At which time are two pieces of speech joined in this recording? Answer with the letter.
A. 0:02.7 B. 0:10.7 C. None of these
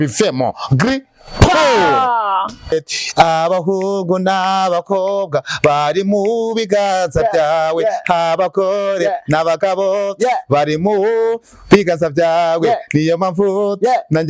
A